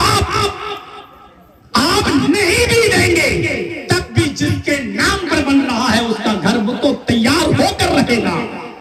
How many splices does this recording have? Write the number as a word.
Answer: zero